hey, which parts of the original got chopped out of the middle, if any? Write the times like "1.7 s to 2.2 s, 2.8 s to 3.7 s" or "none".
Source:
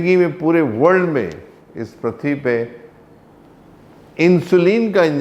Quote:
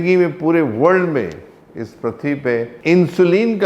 2.7 s to 4.1 s